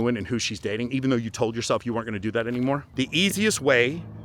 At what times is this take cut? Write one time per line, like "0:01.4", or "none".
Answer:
0:02.9